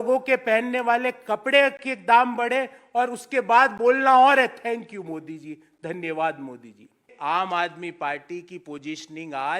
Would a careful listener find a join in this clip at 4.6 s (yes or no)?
no